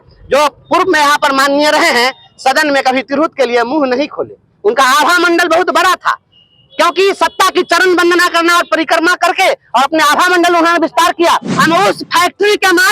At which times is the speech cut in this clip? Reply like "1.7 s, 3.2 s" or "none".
11.5 s